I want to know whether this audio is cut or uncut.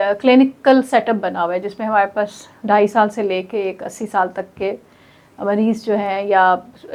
uncut